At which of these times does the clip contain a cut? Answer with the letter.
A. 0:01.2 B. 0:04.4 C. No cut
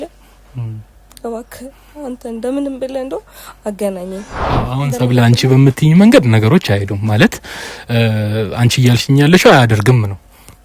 B